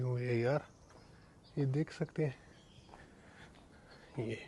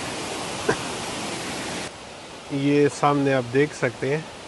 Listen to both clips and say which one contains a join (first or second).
second